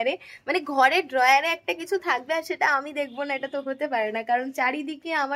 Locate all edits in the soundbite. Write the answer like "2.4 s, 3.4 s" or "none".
none

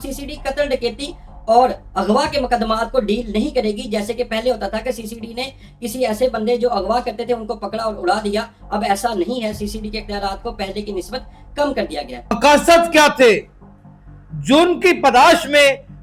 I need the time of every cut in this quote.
none

